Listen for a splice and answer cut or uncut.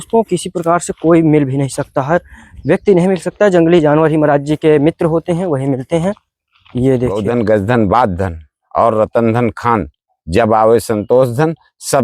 cut